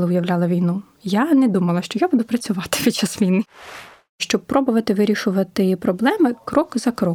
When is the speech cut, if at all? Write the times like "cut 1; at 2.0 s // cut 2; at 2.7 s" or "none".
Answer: cut 1; at 4.1 s